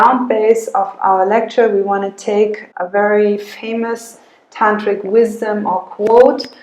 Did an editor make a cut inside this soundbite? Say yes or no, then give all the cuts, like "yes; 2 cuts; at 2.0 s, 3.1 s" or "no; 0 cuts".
yes; 1 cut; at 2.7 s